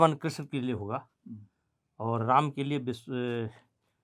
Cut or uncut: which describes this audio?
uncut